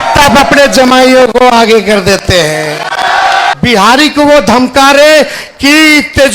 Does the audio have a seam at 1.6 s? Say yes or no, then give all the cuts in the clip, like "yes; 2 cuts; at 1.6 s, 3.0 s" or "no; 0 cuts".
no; 1 cut; at 3.5 s